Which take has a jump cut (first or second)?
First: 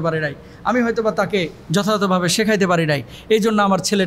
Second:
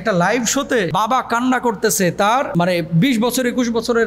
second